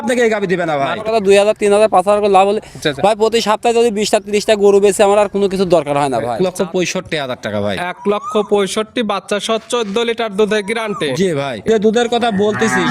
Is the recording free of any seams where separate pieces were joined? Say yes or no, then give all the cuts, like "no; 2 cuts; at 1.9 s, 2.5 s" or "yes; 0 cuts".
no; 3 cuts; at 1.1 s, 6.3 s, 11.6 s